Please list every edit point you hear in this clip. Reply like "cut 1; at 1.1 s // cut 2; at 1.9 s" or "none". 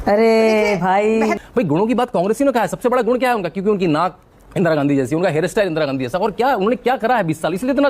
cut 1; at 1.4 s